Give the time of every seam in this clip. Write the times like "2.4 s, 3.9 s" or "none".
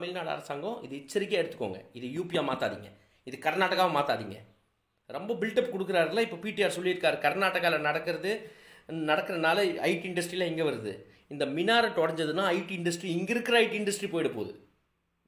none